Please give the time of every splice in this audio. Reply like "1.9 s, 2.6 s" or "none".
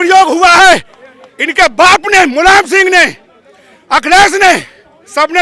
none

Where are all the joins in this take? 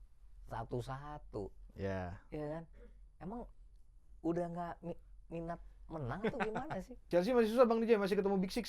7.0 s

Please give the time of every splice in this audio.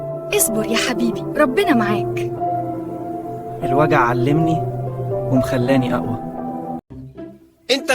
6.9 s

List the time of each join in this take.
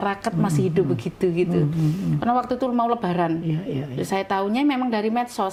none

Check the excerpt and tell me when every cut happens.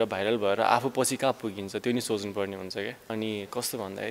3.0 s

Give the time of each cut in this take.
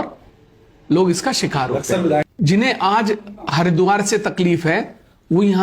2.3 s

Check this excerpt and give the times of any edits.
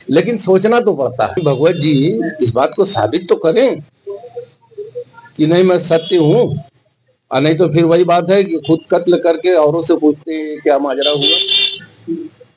1.4 s

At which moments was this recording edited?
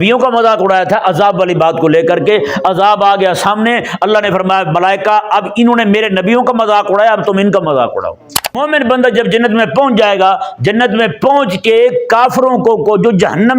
8.6 s

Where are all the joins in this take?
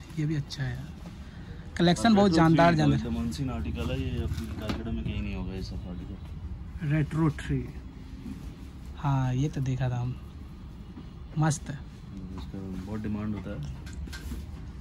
none

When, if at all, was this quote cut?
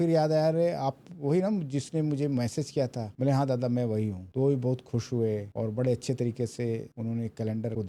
none

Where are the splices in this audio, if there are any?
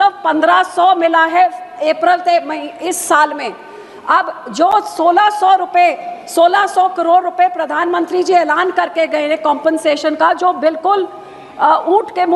none

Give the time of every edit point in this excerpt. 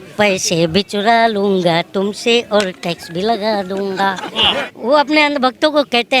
4.4 s

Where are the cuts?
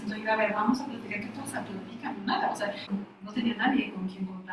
2.8 s

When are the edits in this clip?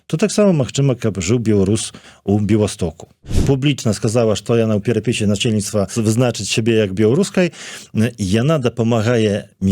3.3 s, 5.9 s

